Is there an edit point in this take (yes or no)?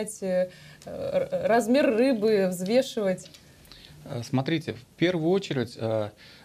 no